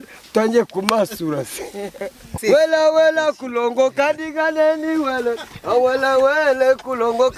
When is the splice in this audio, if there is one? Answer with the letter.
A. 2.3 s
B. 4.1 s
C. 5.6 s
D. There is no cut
A